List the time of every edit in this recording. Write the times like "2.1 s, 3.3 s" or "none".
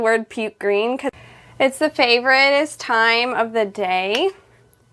1.1 s

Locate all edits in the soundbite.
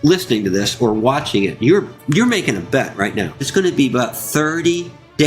3.5 s

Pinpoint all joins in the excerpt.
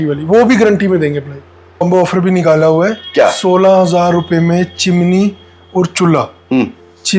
1.8 s

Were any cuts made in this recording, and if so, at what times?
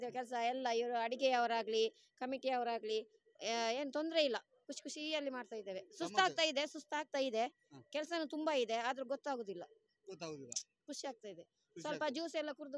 none

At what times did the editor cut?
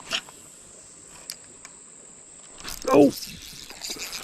2.3 s

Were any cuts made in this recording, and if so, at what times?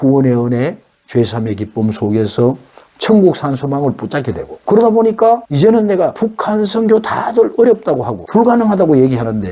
4.5 s, 5.5 s, 6.1 s, 8.1 s

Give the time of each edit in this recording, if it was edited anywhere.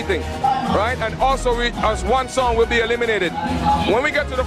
1.4 s

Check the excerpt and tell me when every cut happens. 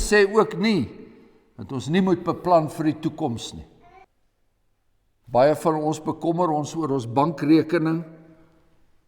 4.1 s

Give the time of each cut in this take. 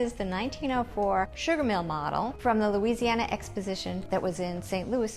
1.4 s, 2.3 s, 4.0 s

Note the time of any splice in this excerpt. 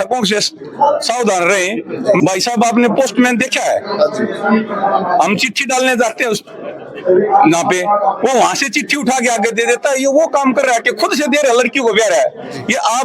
2.2 s

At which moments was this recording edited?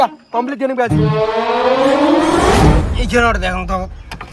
2.8 s

